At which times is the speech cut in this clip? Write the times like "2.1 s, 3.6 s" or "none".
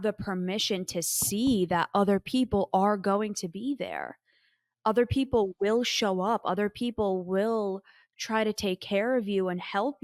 none